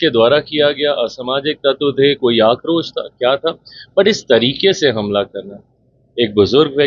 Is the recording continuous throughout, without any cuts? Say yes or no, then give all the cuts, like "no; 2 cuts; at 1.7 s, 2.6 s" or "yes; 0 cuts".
yes; 0 cuts